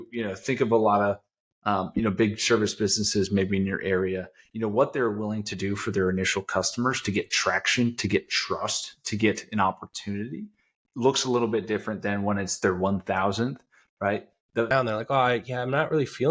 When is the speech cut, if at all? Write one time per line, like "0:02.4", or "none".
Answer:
0:14.7